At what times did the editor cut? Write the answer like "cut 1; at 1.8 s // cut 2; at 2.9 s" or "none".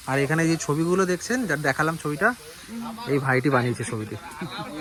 none

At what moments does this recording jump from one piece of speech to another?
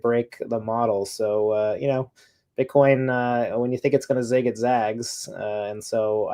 none

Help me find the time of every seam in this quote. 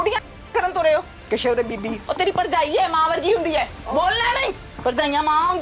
cut 1; at 1.2 s // cut 2; at 4.7 s

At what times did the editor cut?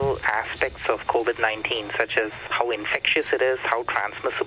cut 1; at 2.4 s

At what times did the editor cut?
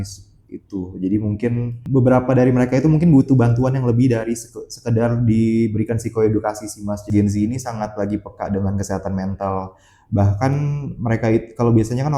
cut 1; at 1.9 s // cut 2; at 7.0 s

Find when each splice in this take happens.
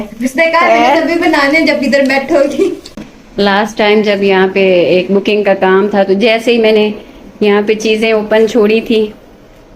cut 1; at 2.9 s

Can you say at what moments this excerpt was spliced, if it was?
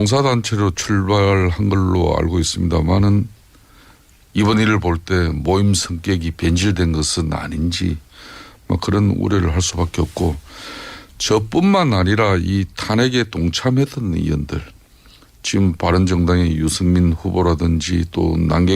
cut 1; at 4.0 s

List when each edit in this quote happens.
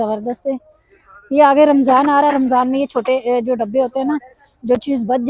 none

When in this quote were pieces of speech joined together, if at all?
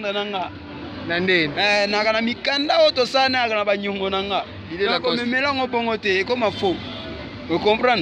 none

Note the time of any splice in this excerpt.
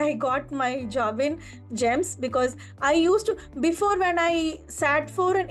none

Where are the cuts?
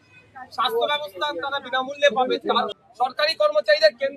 cut 1; at 2.8 s

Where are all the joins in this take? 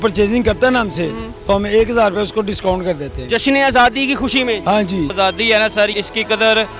cut 1; at 5.1 s // cut 2; at 5.9 s

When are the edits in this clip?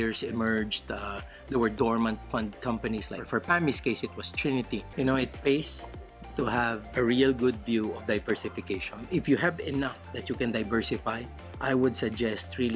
cut 1; at 4.9 s

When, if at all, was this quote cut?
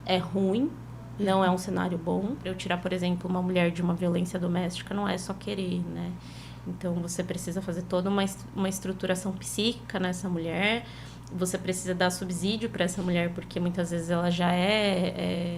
cut 1; at 2.5 s

